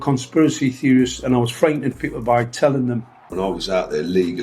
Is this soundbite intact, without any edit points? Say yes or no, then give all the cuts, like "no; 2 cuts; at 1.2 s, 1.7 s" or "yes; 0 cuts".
no; 1 cut; at 3.2 s